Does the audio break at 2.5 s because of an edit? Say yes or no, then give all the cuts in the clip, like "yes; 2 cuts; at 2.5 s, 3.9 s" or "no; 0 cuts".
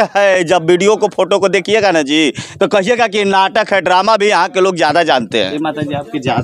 no; 1 cut; at 5.3 s